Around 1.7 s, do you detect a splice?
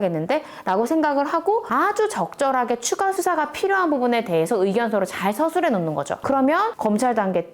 yes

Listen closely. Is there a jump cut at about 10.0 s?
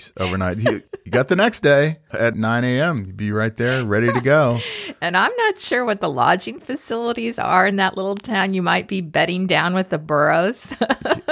no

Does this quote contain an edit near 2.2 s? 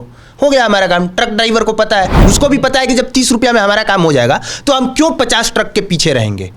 yes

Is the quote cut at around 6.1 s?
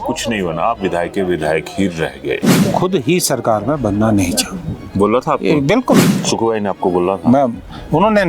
yes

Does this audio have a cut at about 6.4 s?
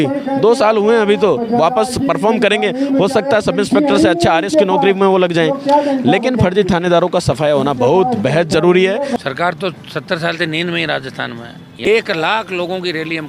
no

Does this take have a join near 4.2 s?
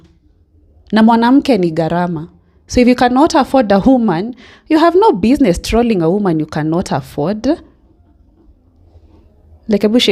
no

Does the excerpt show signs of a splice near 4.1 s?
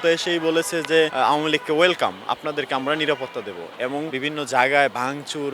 yes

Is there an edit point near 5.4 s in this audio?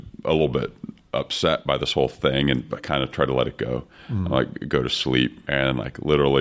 yes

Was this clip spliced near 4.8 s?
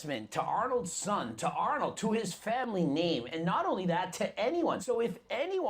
yes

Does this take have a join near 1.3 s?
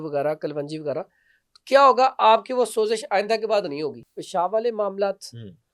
no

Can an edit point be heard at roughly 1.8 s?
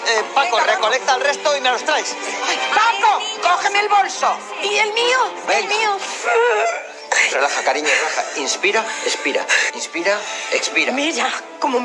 no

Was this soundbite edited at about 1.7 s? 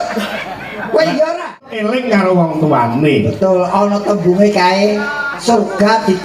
yes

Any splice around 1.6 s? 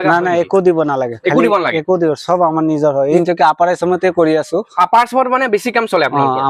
no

